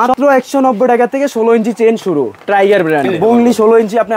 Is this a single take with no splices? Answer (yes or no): no